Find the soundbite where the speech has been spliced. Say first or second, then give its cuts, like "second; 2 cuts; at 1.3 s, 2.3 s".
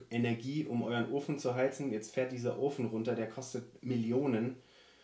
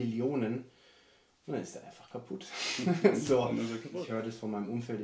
second; 1 cut; at 3.8 s